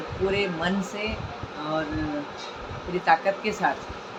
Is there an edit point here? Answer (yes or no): no